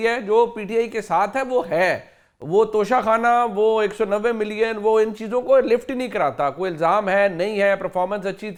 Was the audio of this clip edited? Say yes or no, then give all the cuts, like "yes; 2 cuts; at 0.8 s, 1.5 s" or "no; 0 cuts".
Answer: no; 0 cuts